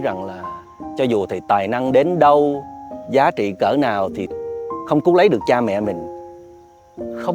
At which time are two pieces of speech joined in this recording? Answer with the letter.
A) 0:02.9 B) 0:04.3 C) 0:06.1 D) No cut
B